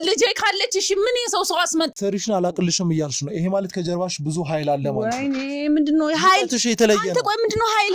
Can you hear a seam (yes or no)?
yes